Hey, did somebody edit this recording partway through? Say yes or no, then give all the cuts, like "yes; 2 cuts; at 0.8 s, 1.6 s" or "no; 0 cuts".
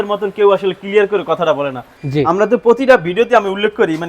yes; 1 cut; at 1.9 s